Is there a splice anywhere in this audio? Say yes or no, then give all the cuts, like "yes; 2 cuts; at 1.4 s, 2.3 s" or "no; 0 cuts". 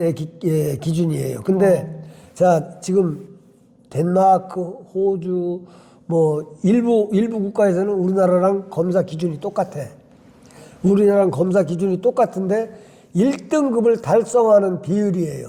no; 0 cuts